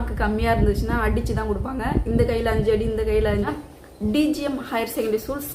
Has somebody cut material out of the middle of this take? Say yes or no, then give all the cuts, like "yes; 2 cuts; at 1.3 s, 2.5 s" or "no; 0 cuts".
yes; 1 cut; at 3.4 s